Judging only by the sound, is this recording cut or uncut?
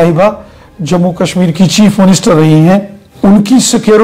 cut